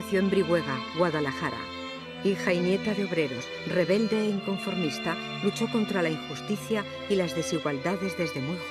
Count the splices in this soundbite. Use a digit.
1